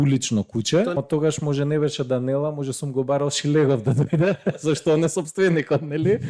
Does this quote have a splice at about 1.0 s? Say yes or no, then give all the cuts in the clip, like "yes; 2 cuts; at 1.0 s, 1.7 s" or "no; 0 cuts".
yes; 1 cut; at 1.0 s